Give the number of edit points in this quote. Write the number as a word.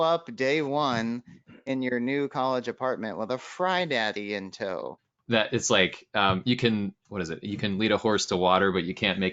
one